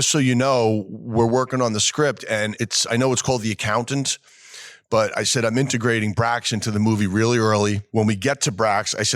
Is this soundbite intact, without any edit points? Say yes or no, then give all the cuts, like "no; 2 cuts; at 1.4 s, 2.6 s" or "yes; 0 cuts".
no; 2 cuts; at 2.6 s, 7.8 s